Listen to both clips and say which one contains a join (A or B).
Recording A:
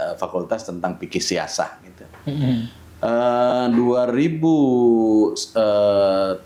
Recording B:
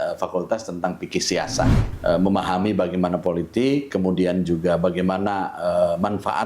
B